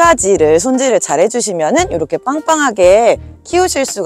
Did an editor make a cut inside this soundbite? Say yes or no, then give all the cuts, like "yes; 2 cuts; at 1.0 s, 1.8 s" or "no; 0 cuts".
no; 0 cuts